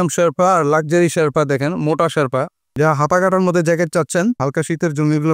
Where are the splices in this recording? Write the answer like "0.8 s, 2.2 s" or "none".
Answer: 2.7 s, 4.4 s